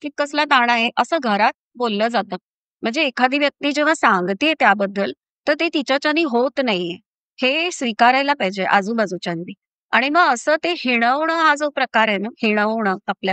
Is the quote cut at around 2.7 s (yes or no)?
no